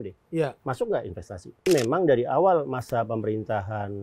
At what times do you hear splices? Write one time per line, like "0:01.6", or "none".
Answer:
0:01.7